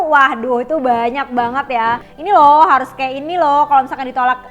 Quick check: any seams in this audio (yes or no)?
yes